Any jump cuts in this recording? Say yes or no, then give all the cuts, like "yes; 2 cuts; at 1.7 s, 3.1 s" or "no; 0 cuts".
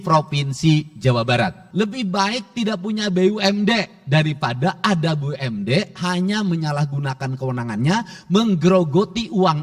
yes; 1 cut; at 1.6 s